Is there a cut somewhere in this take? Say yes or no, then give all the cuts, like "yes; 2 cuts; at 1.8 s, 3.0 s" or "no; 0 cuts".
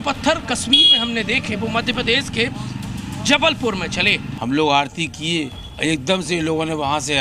yes; 2 cuts; at 4.3 s, 5.6 s